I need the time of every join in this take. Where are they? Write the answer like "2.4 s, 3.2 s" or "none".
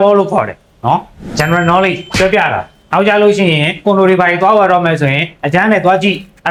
none

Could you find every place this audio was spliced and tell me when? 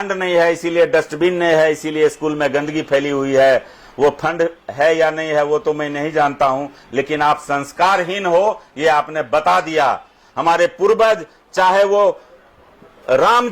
none

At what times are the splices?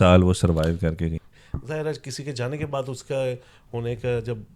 1.2 s

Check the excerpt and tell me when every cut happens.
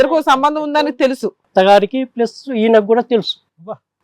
1.3 s

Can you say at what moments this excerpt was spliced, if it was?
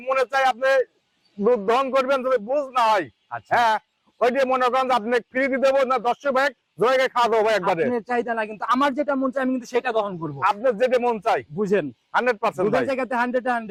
none

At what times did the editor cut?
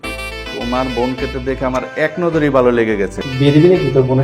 3.2 s

